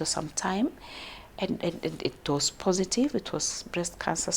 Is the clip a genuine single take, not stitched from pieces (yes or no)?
yes